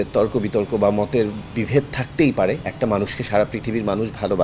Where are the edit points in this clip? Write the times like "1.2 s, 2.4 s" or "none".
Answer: 2.7 s